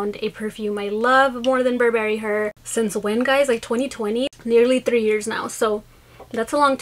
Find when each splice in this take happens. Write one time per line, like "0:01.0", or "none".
0:02.6
0:04.3